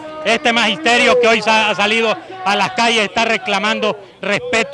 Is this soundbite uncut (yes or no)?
yes